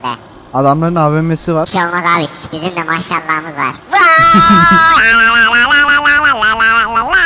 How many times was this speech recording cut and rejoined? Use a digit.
0